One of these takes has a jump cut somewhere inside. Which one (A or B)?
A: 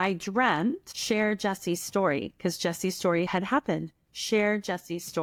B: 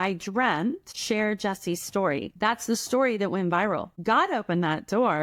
B